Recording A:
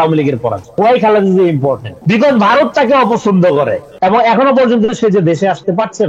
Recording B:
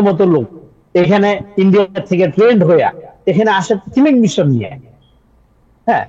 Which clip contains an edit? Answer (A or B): A